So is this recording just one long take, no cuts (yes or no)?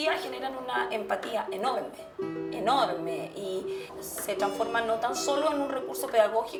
yes